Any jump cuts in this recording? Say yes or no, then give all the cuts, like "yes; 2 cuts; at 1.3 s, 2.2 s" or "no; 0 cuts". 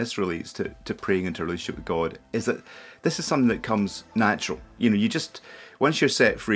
no; 0 cuts